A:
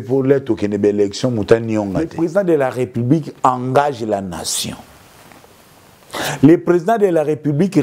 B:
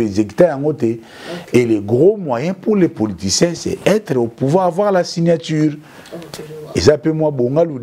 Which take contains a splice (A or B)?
A